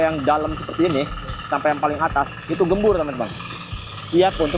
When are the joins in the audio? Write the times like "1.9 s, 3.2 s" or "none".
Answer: none